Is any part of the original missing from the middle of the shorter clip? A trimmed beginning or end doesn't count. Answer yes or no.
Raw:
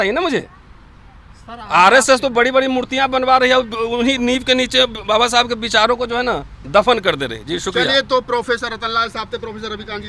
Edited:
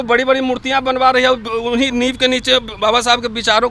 no